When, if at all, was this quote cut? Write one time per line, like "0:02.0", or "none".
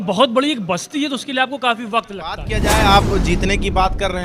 0:02.5